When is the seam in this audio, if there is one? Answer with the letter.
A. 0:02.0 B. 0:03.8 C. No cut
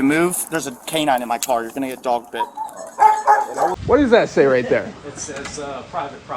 B